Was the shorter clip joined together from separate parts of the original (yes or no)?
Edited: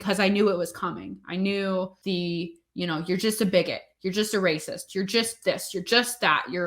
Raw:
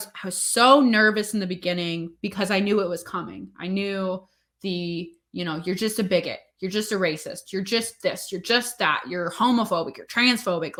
yes